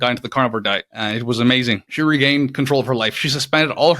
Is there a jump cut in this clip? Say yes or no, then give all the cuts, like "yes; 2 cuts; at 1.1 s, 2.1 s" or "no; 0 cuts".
yes; 2 cuts; at 0.9 s, 1.9 s